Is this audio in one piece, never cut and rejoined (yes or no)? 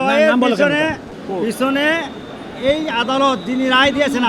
no